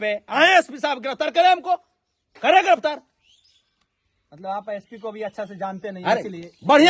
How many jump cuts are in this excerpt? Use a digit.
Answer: 0